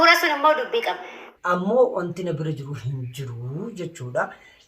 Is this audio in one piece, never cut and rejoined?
no; 1 cut; at 1.3 s

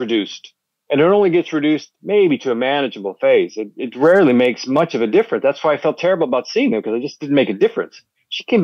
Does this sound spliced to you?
no; 0 cuts

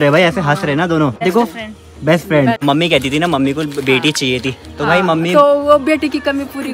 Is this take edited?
yes; 2 cuts; at 1.2 s, 2.6 s

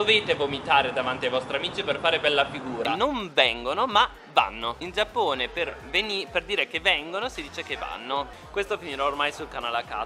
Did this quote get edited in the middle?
yes; 2 cuts; at 2.9 s, 8.4 s

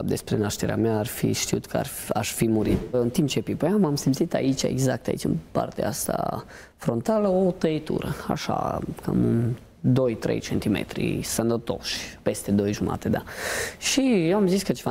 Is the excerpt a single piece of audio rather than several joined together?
no; 1 cut; at 2.9 s

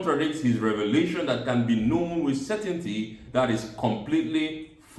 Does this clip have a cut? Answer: no; 0 cuts

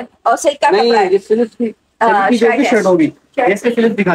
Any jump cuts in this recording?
no; 0 cuts

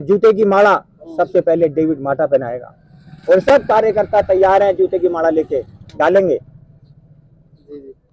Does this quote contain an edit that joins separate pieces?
no; 0 cuts

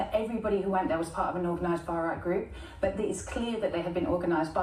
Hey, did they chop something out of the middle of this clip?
no; 0 cuts

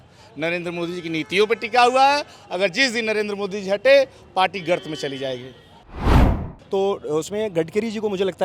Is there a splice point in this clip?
yes; 1 cut; at 6.5 s

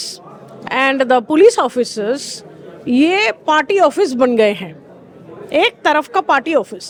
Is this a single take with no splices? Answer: yes; 0 cuts

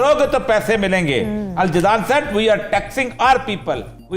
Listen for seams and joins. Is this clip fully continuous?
yes; 0 cuts

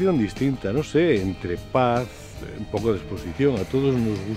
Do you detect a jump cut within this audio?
no; 0 cuts

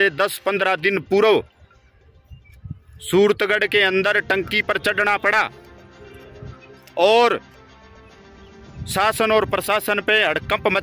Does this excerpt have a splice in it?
no; 0 cuts

